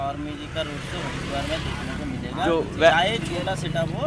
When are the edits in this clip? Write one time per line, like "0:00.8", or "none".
none